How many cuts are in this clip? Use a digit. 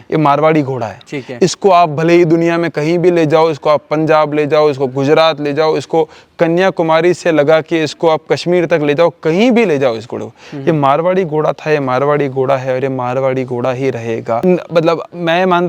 1